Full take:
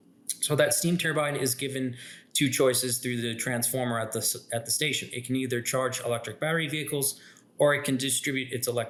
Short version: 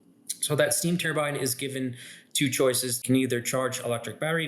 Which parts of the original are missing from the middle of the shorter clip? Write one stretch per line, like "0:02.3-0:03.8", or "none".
0:03.0-0:05.2